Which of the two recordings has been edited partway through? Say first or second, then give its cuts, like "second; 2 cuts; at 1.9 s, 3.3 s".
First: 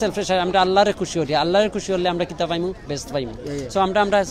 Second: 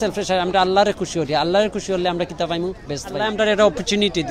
second; 1 cut; at 3.2 s